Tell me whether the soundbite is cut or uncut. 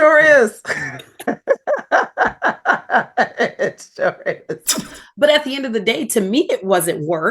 cut